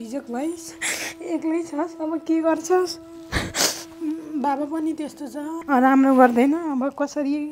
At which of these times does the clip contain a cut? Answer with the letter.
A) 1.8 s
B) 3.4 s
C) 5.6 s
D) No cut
C